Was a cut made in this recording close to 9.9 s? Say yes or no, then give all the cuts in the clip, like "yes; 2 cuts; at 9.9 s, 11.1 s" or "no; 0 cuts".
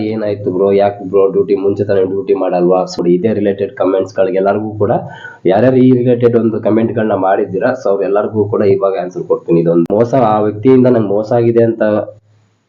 yes; 2 cuts; at 3.0 s, 9.9 s